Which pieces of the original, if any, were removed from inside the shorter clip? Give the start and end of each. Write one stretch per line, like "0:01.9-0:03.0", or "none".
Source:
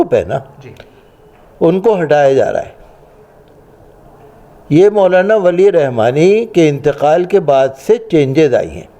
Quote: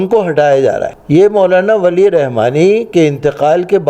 0:02.7-0:04.6